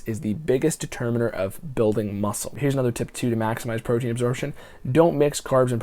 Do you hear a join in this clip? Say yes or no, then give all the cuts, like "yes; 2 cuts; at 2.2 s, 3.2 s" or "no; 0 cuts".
yes; 1 cut; at 2.6 s